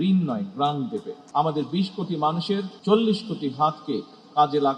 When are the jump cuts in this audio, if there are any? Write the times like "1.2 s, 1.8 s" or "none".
1.1 s